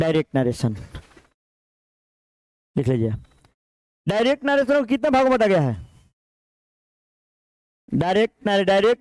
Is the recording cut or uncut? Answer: uncut